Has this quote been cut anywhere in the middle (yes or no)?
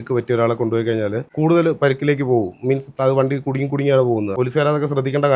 yes